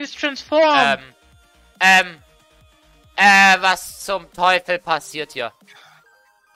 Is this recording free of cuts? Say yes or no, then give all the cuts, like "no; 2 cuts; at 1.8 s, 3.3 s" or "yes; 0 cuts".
yes; 0 cuts